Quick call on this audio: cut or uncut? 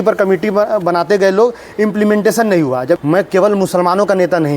cut